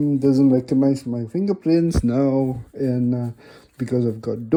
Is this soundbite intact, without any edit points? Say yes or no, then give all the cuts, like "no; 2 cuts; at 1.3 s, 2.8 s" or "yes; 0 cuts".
yes; 0 cuts